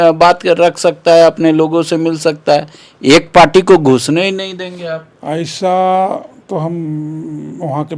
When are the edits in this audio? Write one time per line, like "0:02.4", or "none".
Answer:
none